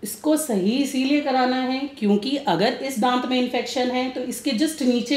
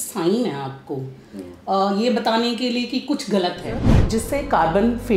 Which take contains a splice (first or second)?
second